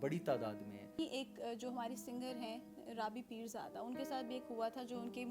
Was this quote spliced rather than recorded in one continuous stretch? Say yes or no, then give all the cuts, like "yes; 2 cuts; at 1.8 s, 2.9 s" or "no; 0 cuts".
yes; 1 cut; at 1.0 s